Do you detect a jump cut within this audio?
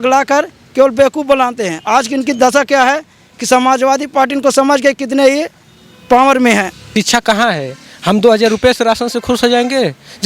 yes; 1 cut; at 6.8 s

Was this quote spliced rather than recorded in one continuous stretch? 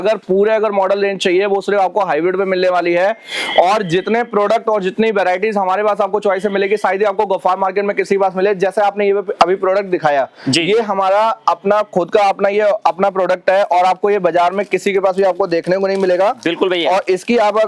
no; 0 cuts

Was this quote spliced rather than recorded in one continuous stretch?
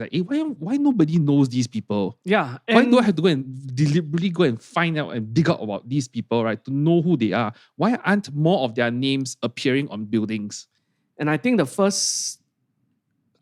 no; 0 cuts

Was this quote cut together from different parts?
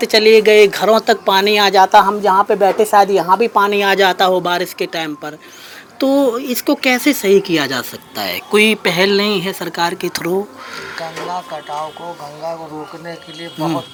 no; 0 cuts

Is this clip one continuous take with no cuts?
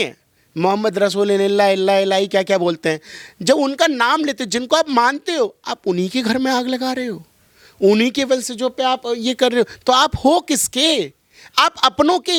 yes; 0 cuts

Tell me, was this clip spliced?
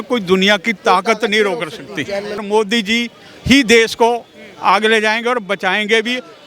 yes; 1 cut; at 2.4 s

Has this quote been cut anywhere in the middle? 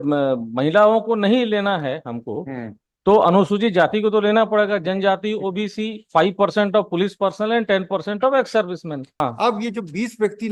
yes; 1 cut; at 9.2 s

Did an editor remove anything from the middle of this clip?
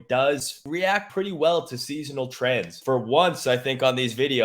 yes; 2 cuts; at 1.0 s, 2.7 s

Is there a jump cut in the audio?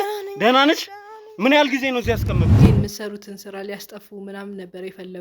yes; 1 cut; at 2.5 s

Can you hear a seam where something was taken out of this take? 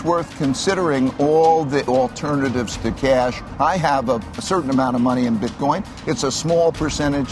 yes; 3 cuts; at 1.9 s, 3.4 s, 4.4 s

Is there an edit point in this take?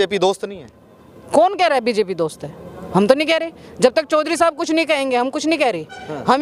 no; 0 cuts

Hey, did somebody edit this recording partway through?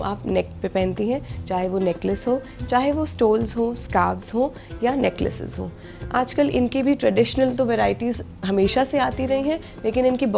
no; 0 cuts

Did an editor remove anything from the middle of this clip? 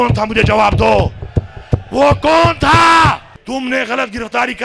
yes; 1 cut; at 3.3 s

